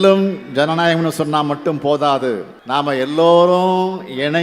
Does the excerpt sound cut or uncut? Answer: cut